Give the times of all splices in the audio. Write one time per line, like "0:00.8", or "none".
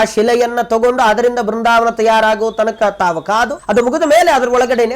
0:03.6